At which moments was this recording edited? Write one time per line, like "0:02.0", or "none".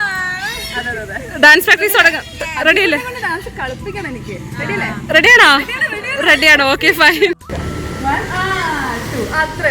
0:07.5